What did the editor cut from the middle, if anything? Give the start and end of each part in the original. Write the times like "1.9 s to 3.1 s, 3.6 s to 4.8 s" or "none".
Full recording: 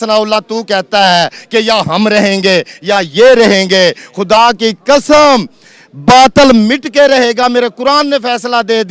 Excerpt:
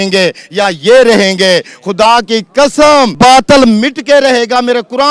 5.4 s to 6.0 s

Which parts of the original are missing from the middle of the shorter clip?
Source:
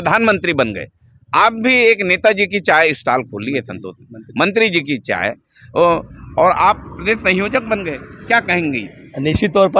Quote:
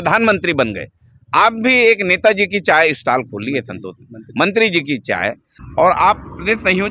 5.6 s to 6.2 s

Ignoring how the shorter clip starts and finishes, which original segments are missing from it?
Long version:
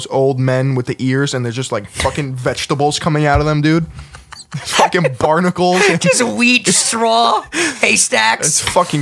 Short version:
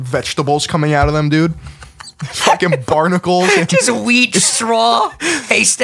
none

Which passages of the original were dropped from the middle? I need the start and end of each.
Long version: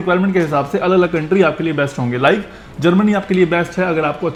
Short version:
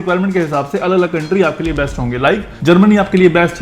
2.5 s to 2.7 s

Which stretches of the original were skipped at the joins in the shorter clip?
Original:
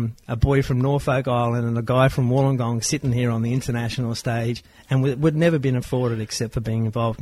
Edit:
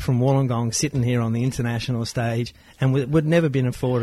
none

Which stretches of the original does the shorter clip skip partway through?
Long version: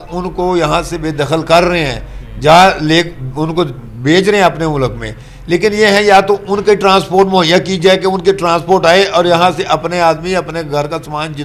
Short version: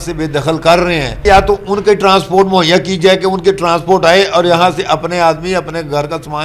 2.1 s to 6.0 s

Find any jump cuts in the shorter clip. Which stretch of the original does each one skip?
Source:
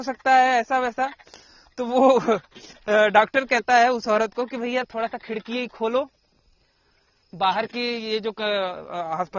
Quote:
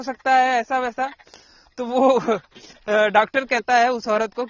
none

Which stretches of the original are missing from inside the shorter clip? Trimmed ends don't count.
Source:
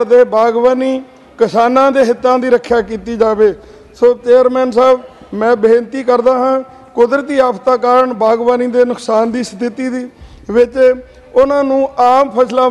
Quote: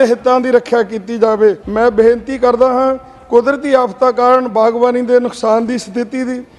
3.6 s to 5.3 s

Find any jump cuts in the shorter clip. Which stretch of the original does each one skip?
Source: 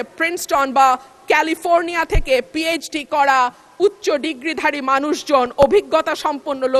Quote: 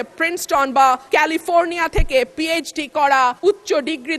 1.0 s to 1.2 s, 3.5 s to 3.7 s

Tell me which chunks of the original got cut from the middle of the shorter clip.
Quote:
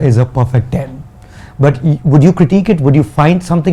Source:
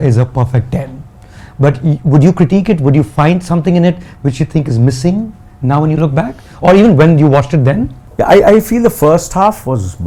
none

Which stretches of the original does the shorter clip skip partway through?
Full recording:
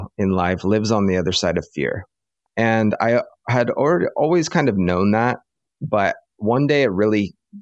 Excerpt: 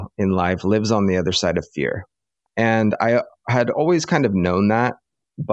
3.7 s to 4.2 s

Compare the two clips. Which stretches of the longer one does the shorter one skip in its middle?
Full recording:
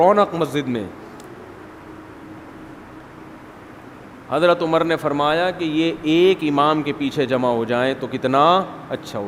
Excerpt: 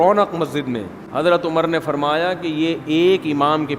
1.0 s to 4.1 s

